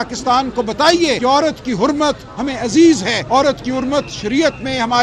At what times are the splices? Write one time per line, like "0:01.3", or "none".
0:01.2
0:03.1